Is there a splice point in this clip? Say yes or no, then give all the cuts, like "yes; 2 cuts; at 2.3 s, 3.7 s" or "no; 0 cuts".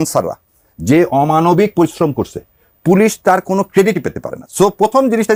no; 0 cuts